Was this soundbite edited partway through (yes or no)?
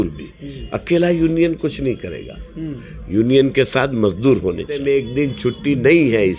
yes